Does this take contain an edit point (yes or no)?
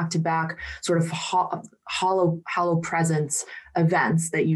no